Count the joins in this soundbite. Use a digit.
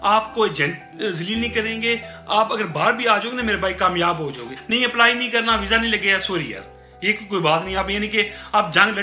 1